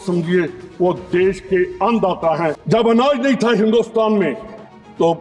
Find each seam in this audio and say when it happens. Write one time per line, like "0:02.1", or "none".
0:02.6